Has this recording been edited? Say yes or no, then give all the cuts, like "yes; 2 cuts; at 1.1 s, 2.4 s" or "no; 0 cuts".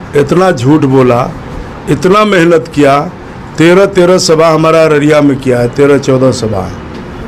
no; 0 cuts